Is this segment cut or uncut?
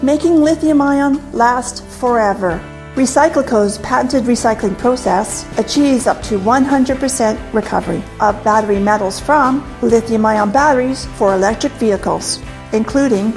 cut